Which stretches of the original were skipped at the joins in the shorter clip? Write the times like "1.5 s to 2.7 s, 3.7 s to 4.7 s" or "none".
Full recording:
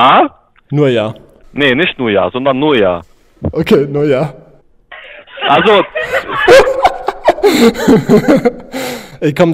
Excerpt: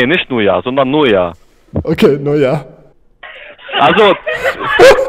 none